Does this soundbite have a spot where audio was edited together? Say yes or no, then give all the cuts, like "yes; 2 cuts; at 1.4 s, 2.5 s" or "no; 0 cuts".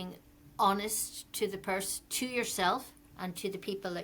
no; 0 cuts